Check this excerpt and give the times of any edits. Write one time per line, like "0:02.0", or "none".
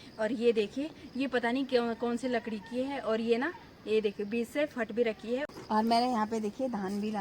0:05.6

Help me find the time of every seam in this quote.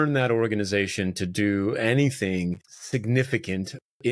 none

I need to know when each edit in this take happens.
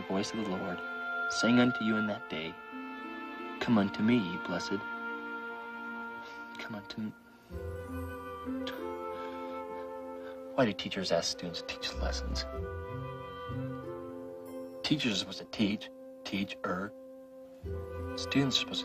0:03.9

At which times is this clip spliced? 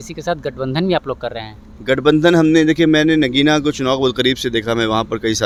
none

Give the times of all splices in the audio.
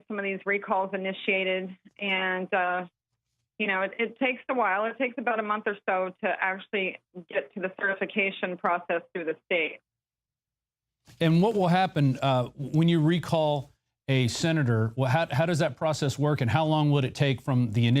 none

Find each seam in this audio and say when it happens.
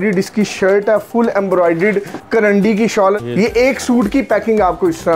0:02.2
0:03.2

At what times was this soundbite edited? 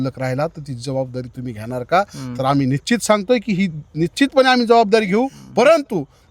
0:05.4

